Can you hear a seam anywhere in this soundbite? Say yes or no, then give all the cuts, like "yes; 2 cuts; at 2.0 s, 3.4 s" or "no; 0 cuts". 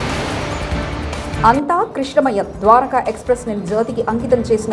yes; 1 cut; at 1.3 s